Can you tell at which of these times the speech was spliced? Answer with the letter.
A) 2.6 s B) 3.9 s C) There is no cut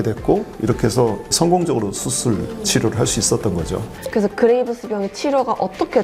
B